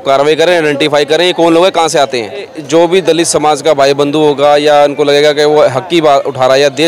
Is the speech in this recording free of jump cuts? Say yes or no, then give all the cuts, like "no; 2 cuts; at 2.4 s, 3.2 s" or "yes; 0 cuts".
no; 1 cut; at 2.6 s